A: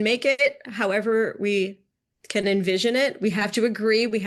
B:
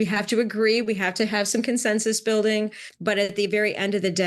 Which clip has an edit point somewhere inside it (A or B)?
B